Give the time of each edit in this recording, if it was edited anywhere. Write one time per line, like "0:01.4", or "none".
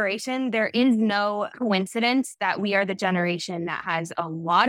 0:01.5